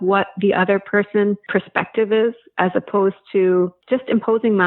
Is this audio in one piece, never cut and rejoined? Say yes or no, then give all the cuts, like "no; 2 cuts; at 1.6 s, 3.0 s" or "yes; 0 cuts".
no; 2 cuts; at 1.4 s, 3.8 s